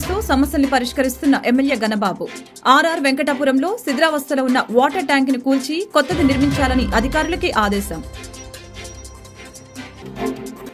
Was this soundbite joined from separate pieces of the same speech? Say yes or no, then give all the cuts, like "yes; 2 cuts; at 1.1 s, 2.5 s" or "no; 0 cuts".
no; 0 cuts